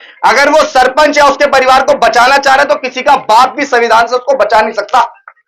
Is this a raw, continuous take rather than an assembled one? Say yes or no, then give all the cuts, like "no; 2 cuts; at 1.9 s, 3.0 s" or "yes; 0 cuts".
yes; 0 cuts